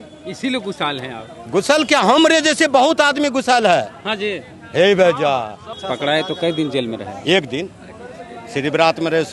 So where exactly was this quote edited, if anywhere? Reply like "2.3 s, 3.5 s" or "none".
5.7 s